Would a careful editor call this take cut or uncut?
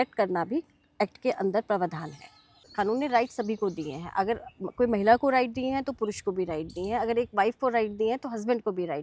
cut